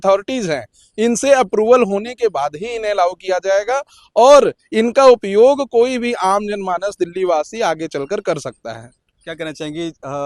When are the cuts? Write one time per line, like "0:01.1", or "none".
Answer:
none